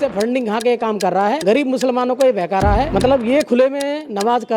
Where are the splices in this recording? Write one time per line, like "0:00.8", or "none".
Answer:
0:01.4
0:02.9

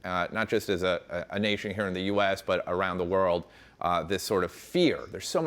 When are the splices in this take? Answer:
none

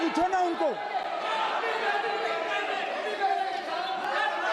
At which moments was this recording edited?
none

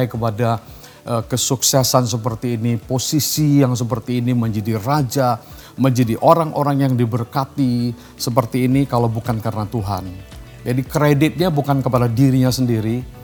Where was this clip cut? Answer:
none

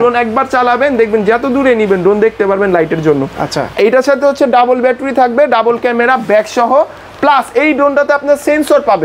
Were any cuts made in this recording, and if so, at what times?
none

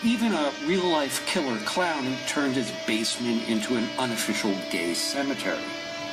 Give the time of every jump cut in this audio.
0:00.9

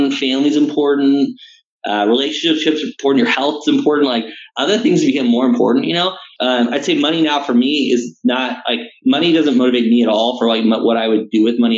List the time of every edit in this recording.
0:06.2

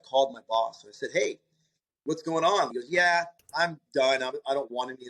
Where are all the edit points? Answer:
0:02.7

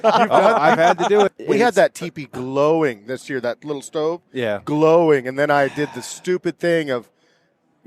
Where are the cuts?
0:01.4

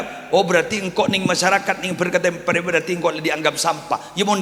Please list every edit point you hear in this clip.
none

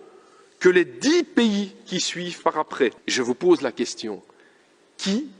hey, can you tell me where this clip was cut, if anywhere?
0:03.0

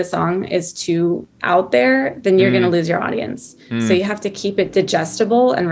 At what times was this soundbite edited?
none

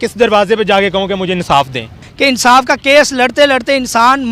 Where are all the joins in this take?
0:02.0

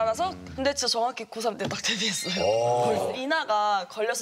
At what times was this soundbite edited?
0:03.1

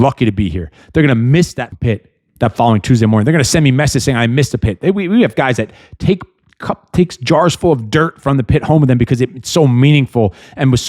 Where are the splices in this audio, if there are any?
0:01.7

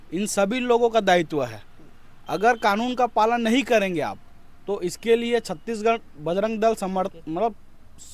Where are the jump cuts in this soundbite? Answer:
none

